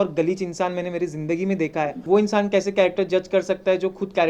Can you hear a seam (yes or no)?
yes